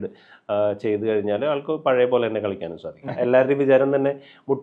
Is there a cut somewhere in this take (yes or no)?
yes